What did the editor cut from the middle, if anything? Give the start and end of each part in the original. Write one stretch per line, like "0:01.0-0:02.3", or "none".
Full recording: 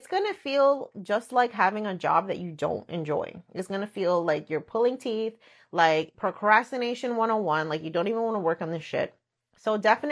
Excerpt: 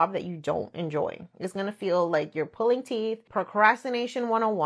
0:05.4-0:06.1